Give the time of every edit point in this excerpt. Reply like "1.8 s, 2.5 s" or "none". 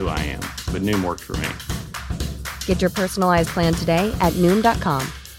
none